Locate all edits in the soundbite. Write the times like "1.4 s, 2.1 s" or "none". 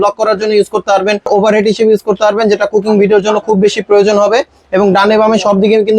1.3 s